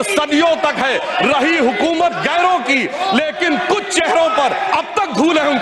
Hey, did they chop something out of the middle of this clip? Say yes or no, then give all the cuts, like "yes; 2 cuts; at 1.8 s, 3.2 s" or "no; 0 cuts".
no; 0 cuts